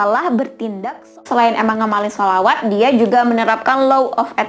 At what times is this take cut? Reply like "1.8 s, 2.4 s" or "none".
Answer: 1.2 s